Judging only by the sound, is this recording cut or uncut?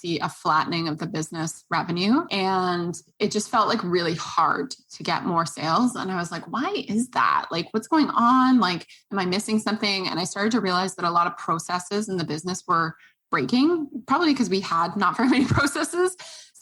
cut